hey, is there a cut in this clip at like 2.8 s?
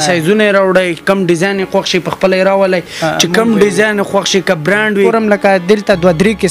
no; 1 cut; at 5.1 s

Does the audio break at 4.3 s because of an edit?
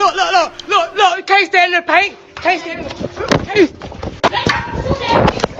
yes; 1 cut; at 4.3 s

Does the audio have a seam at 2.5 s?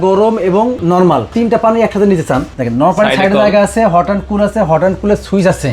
yes; 2 cuts; at 0.9 s, 2.5 s

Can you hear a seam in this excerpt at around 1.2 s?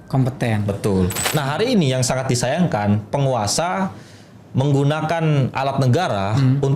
yes; 1 cut; at 1.2 s

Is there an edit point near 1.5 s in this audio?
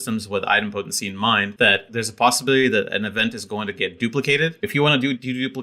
yes; 2 cuts; at 1.5 s, 4.6 s

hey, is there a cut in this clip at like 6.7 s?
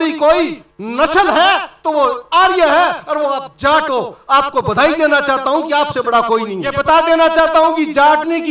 yes; 1 cut; at 6.7 s

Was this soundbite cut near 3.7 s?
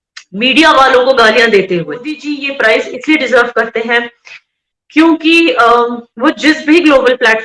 no; 1 cut; at 2.3 s

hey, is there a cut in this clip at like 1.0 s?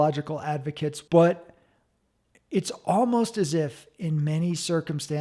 yes; 1 cut; at 1.0 s

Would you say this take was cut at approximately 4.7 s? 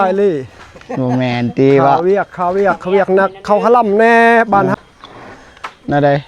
yes; 1 cut; at 4.7 s

